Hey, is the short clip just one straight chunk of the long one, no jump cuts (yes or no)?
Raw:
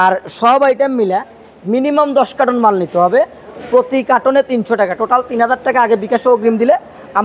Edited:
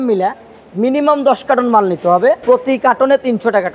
no